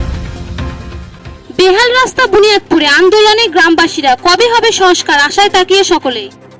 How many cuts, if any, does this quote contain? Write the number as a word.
one